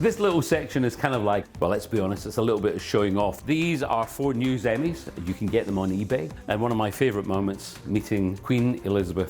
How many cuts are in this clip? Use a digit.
4